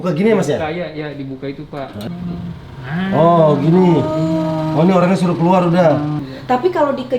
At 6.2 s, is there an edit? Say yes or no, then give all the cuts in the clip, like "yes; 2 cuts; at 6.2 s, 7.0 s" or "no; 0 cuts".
yes; 2 cuts; at 2.1 s, 6.2 s